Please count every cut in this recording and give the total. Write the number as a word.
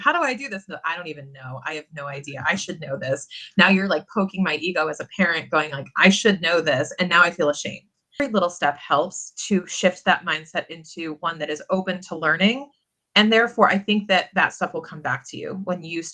one